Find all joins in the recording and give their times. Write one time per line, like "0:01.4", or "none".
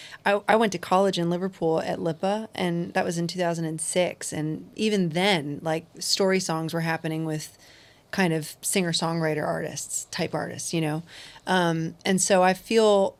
none